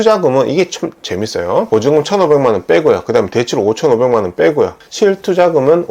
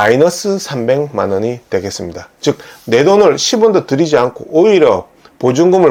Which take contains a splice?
first; 2 cuts; at 1.7 s, 4.8 s

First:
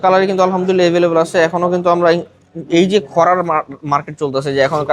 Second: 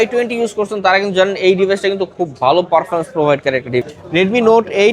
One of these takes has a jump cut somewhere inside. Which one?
second; 1 cut; at 3.8 s

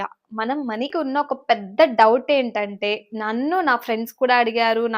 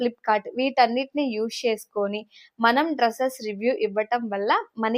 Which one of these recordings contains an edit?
first; 1 cut; at 0.9 s

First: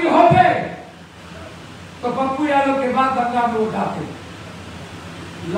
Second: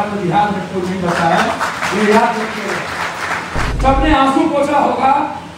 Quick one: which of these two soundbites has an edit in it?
second; 1 cut; at 3.6 s

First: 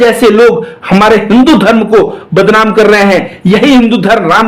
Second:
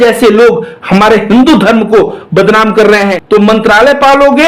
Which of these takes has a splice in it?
second; 1 cut; at 3.2 s

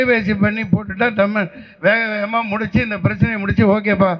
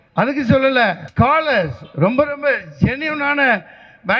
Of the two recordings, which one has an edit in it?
second; 1 cut; at 1.0 s

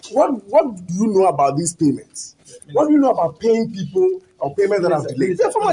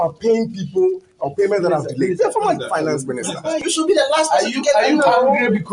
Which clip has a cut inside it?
second; 1 cut; at 3.7 s

